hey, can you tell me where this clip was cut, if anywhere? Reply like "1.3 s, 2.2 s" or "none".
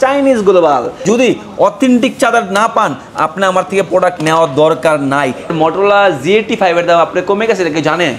1.0 s, 5.5 s